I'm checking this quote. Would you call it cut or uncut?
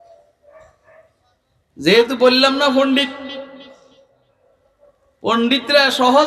uncut